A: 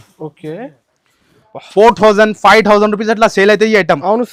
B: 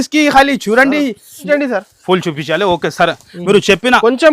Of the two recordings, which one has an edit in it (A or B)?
B